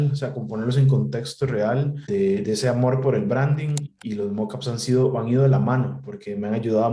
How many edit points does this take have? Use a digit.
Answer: 2